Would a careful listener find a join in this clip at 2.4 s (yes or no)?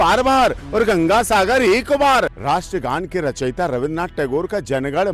yes